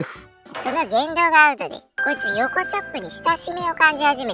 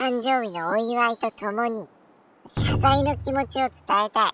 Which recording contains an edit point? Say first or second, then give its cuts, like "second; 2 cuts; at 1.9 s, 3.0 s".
first; 1 cut; at 1.9 s